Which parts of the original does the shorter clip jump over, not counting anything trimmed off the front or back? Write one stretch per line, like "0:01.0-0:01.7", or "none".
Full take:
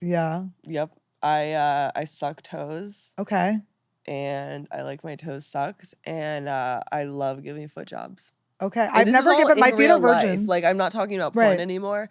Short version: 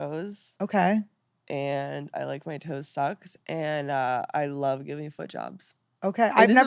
none